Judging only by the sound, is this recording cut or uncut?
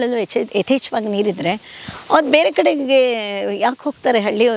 uncut